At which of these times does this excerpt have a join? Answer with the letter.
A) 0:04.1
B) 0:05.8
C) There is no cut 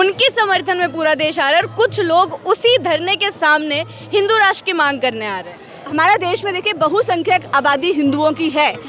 B